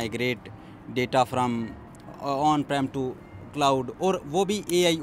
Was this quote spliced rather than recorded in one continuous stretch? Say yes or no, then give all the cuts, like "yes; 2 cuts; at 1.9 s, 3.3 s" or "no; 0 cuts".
no; 0 cuts